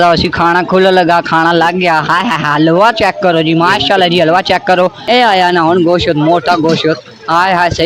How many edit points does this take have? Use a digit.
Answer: 1